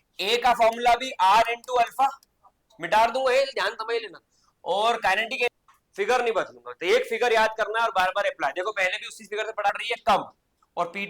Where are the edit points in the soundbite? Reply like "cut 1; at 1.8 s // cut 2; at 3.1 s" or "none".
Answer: cut 1; at 5.5 s // cut 2; at 9.7 s